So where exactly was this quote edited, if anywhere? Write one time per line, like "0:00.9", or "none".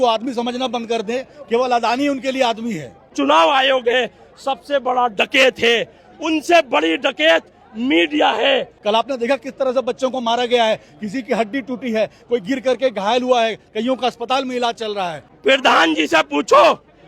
0:03.1
0:08.7
0:15.3